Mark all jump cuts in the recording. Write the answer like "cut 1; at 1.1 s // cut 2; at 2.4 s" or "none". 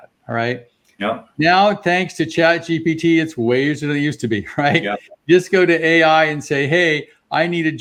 none